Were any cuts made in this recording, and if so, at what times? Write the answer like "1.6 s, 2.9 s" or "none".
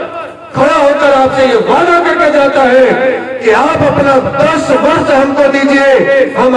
none